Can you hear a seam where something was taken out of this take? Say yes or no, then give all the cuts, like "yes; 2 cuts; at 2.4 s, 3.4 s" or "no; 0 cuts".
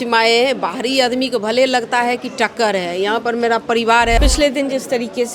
yes; 1 cut; at 4.2 s